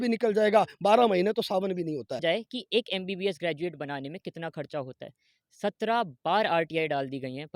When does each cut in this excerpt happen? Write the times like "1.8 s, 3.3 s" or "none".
2.2 s